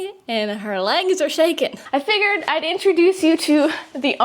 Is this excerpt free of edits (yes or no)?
no